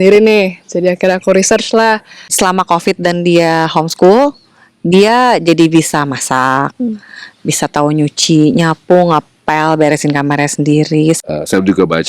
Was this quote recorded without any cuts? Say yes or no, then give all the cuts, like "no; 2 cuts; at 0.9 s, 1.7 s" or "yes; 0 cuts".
no; 2 cuts; at 2.3 s, 11.2 s